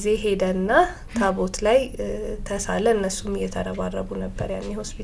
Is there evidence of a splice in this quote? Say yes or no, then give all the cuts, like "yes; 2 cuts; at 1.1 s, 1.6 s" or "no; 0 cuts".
no; 0 cuts